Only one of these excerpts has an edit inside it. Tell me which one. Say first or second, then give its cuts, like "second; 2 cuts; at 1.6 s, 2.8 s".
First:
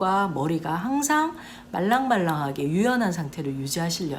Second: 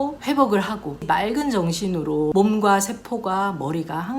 second; 2 cuts; at 1.0 s, 2.3 s